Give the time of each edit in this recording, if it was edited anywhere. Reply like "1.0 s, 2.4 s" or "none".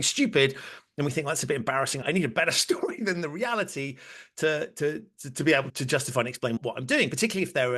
2.0 s, 5.7 s, 6.6 s